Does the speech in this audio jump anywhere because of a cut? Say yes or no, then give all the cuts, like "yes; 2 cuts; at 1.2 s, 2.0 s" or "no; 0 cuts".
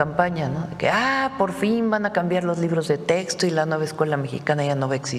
no; 0 cuts